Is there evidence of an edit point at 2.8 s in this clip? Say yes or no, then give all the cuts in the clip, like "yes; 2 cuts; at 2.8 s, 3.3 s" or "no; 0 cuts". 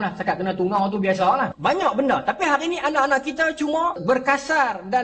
no; 2 cuts; at 1.5 s, 4.0 s